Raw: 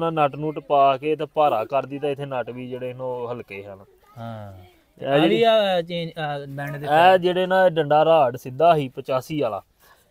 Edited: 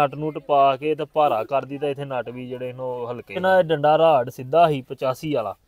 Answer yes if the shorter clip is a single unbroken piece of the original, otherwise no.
no